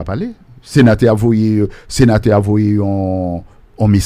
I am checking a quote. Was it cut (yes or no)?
no